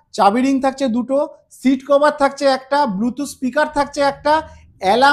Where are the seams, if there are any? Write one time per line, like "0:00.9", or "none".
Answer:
none